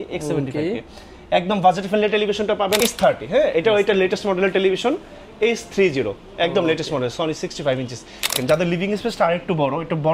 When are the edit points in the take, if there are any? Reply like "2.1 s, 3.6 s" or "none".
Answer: 2.8 s, 8.4 s